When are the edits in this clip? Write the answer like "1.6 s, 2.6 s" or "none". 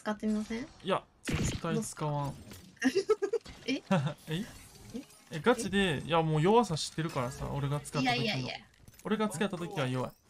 none